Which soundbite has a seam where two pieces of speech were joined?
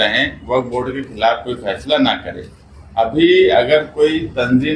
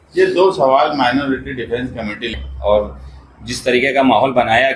second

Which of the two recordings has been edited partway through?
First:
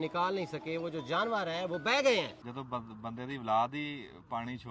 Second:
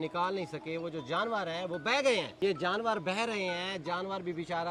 first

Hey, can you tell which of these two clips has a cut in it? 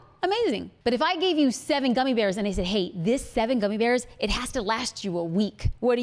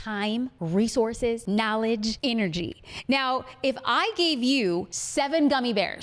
second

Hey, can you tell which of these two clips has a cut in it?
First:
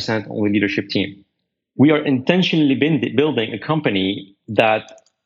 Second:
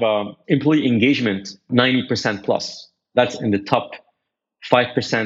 second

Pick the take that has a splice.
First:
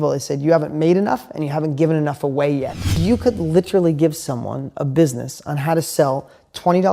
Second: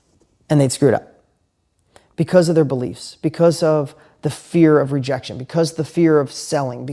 first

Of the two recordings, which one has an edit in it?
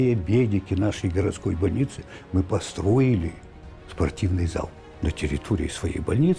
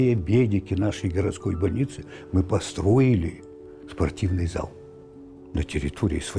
first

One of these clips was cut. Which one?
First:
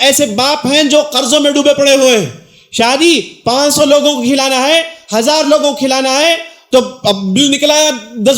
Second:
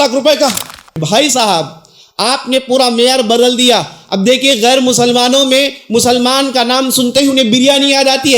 second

